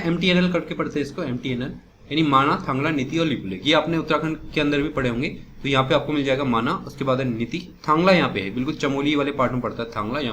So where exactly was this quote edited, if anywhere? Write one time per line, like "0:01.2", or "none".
none

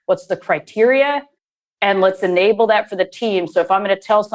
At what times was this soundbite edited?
none

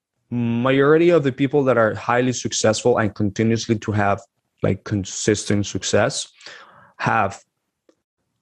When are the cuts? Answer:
none

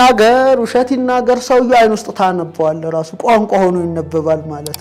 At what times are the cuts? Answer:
none

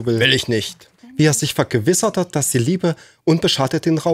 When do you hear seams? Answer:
0:00.9

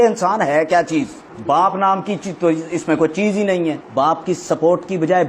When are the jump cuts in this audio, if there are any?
0:01.3
0:03.8

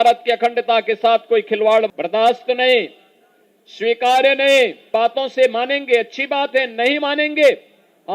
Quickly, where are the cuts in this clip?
0:02.0
0:04.9

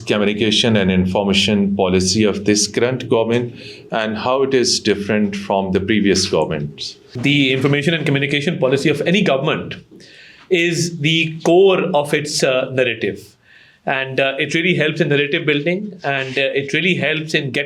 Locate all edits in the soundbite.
0:07.1

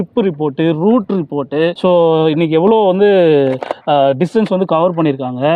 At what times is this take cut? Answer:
none

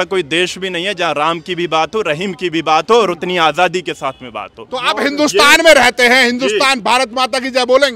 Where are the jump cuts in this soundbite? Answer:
none

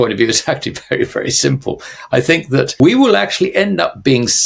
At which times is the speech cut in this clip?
0:02.7

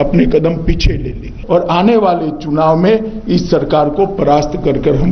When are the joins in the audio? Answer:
0:01.4

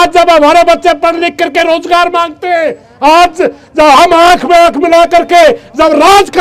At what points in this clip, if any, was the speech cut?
none

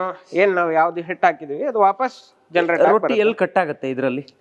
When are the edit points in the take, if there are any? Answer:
none

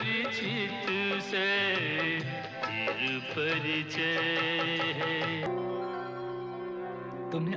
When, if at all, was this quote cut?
0:05.5

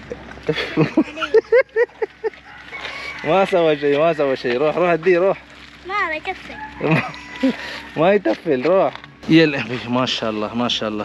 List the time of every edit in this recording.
0:09.1

